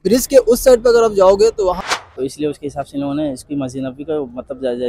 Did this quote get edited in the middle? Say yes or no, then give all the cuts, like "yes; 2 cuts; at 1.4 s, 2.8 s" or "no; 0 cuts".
yes; 1 cut; at 1.8 s